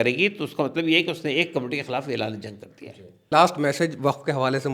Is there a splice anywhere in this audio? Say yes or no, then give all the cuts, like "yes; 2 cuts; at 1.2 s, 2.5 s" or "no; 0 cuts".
yes; 1 cut; at 3.3 s